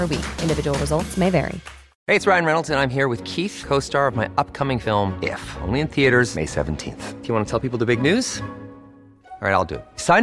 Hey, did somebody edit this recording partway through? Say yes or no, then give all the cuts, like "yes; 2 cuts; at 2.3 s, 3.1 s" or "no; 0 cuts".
yes; 1 cut; at 1.9 s